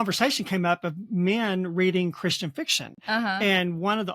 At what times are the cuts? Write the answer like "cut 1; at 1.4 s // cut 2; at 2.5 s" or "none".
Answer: none